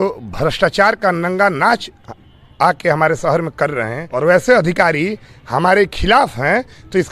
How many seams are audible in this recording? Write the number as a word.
one